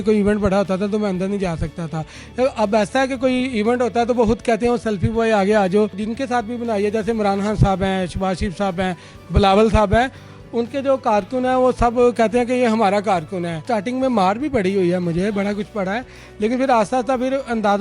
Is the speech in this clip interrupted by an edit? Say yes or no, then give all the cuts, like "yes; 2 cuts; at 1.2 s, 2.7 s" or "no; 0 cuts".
yes; 2 cuts; at 6.0 s, 13.6 s